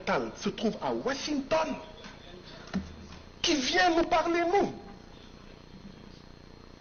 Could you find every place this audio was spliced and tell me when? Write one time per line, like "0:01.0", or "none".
none